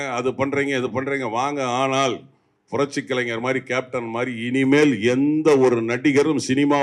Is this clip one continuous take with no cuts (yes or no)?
yes